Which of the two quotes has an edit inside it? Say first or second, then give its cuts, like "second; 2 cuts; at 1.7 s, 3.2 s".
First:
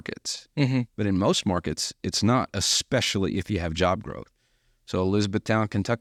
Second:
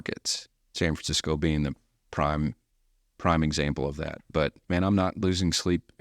second; 2 cuts; at 0.8 s, 4.6 s